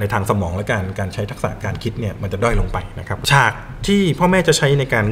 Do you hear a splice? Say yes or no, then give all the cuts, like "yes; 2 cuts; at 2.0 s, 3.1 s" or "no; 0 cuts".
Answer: yes; 1 cut; at 3.2 s